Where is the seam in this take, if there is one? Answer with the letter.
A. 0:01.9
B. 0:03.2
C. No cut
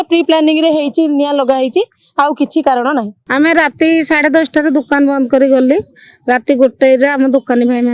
B